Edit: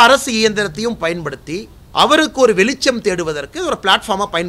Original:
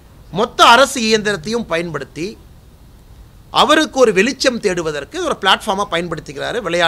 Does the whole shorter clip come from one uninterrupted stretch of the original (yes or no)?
no